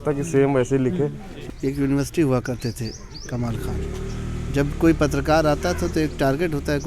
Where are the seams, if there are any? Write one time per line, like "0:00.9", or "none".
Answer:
0:01.3